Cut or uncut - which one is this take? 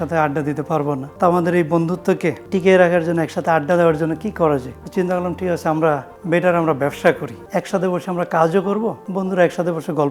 cut